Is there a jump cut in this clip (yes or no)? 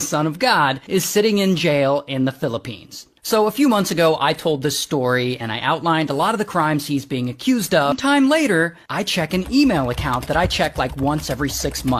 yes